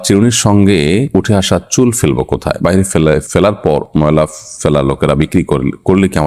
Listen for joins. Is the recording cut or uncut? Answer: uncut